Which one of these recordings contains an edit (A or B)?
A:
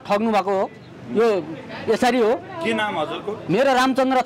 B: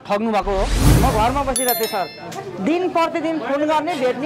B